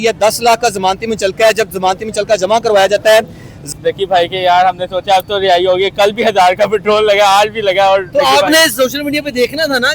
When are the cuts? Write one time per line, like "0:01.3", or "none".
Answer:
0:03.7